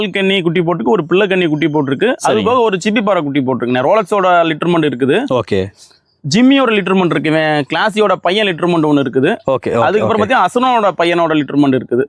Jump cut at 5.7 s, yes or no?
no